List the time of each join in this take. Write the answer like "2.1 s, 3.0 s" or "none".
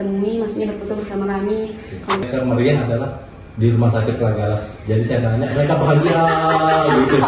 2.2 s